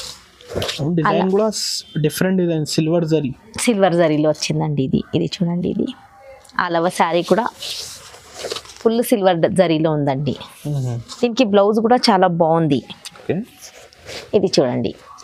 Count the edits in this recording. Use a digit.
0